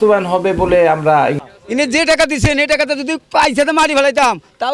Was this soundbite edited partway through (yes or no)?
yes